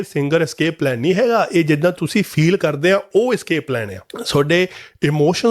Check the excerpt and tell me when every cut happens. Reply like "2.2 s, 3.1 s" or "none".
none